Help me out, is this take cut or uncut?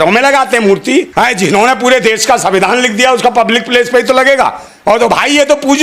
cut